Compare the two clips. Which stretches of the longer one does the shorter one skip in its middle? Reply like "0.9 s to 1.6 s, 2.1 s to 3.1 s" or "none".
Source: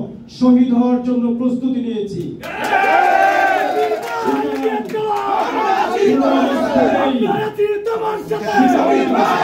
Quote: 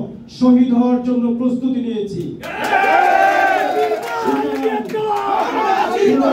none